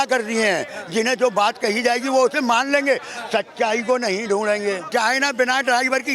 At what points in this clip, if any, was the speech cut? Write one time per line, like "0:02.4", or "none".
0:04.8